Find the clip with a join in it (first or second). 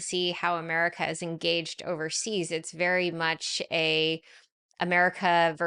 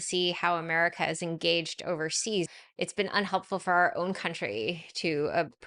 second